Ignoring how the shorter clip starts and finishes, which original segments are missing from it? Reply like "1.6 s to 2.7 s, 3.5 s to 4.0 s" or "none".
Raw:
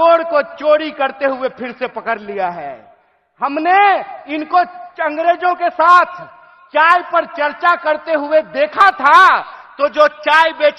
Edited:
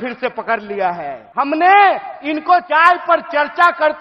2.8 s to 3.2 s, 4.7 s to 6.7 s

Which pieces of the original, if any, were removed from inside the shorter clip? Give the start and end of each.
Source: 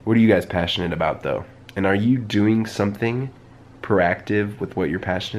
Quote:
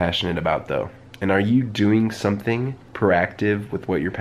3.3 s to 3.7 s

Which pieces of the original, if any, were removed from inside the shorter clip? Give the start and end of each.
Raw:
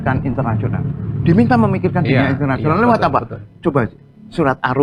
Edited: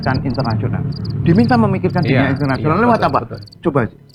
none

